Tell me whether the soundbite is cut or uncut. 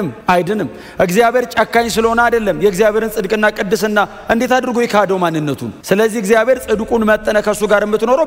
uncut